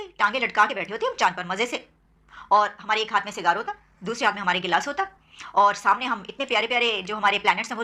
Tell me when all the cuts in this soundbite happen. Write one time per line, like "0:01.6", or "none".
none

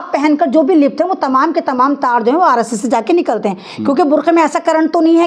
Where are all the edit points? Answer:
none

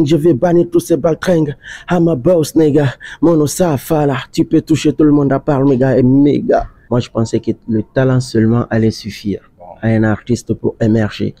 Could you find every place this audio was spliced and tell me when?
0:06.8

